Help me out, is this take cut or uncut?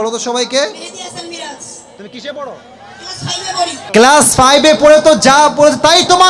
cut